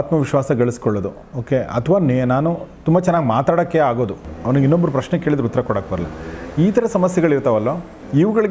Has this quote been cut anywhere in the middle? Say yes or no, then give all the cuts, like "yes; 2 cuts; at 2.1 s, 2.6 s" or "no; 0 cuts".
yes; 1 cut; at 4.3 s